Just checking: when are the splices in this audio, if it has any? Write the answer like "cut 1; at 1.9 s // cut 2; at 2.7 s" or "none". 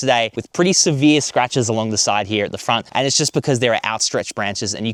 none